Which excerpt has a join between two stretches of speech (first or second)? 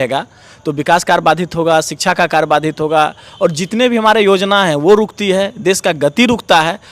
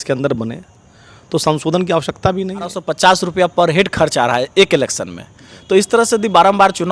second